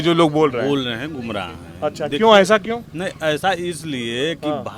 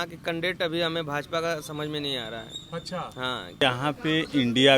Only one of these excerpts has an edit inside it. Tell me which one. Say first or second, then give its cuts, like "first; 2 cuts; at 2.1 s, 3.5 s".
second; 1 cut; at 3.6 s